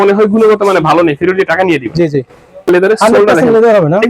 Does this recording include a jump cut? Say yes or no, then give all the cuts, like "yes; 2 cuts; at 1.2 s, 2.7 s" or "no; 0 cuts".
yes; 1 cut; at 2.7 s